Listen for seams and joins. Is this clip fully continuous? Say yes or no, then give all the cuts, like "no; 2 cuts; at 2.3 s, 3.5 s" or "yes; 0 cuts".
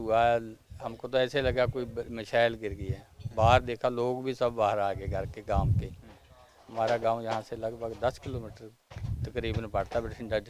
yes; 0 cuts